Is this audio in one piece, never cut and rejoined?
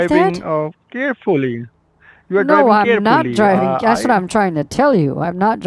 yes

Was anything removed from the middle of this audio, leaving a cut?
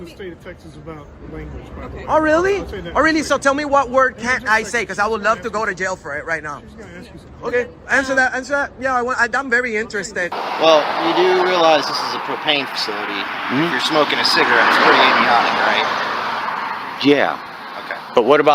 yes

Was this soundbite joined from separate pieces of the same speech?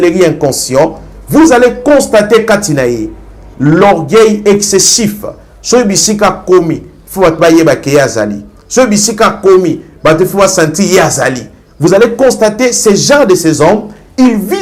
no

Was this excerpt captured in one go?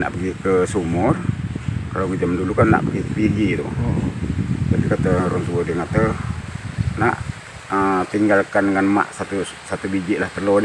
yes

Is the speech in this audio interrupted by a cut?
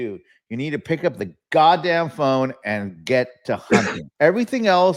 yes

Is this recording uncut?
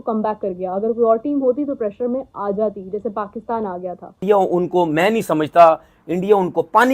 no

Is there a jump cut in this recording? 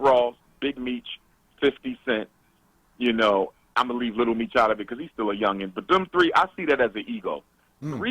no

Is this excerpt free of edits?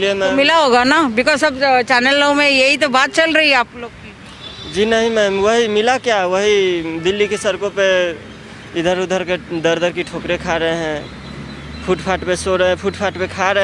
yes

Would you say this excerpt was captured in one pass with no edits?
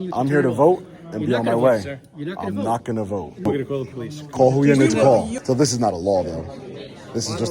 no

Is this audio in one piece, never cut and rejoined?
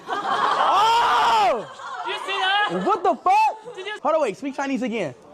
no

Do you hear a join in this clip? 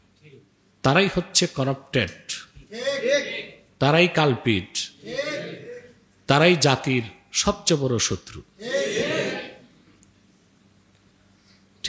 no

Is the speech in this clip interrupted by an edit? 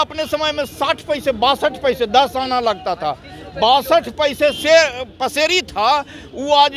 no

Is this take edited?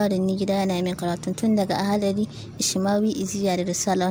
no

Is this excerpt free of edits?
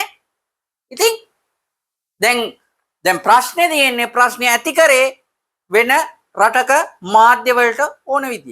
yes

